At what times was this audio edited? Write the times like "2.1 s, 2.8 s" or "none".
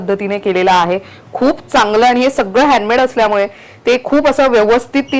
none